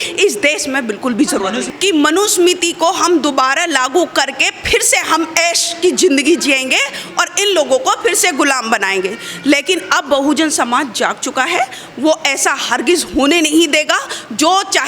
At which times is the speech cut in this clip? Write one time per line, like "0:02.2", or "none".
0:01.7